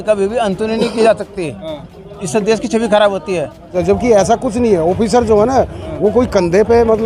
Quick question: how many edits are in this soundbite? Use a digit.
1